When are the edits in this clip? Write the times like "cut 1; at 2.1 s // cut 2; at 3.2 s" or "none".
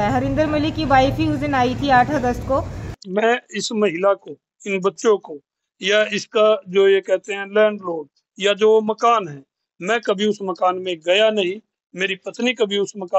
cut 1; at 3.0 s